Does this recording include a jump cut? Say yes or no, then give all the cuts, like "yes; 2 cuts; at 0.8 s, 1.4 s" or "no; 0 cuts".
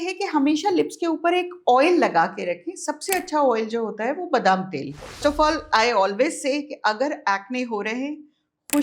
yes; 1 cut; at 5.2 s